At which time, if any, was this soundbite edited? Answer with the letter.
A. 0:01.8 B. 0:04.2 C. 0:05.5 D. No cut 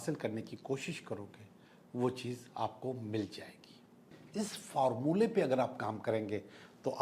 B